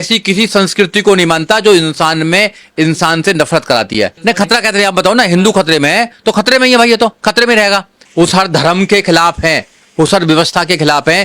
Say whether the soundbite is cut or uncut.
cut